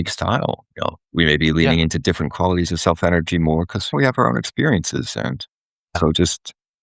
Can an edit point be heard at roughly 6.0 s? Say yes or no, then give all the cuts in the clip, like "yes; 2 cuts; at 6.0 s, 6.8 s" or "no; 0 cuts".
yes; 3 cuts; at 1.0 s, 3.9 s, 6.0 s